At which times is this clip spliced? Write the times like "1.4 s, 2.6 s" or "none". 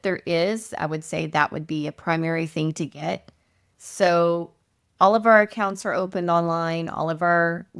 none